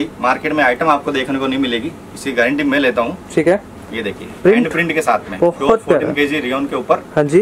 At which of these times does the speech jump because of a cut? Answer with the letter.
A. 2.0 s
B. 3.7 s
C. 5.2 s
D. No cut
D